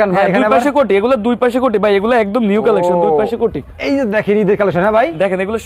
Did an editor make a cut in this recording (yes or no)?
no